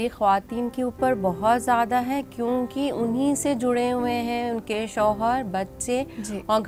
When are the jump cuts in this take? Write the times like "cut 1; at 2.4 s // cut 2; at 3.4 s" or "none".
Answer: none